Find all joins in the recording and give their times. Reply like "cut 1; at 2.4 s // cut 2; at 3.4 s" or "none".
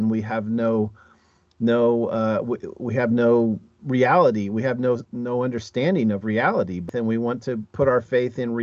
cut 1; at 6.9 s